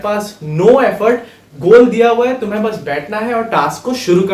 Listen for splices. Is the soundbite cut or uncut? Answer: uncut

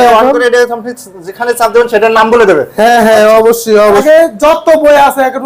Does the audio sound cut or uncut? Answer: cut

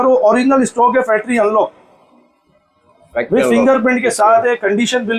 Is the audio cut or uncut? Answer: uncut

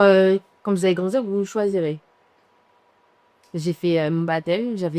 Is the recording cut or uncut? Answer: uncut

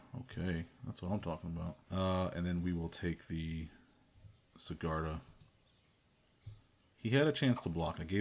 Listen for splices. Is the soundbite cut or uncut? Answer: cut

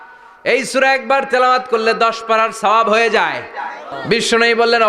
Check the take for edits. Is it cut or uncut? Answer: cut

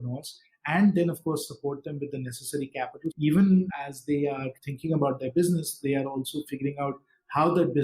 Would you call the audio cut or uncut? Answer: cut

